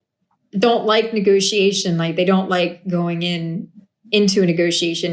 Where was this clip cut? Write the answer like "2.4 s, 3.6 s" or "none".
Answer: none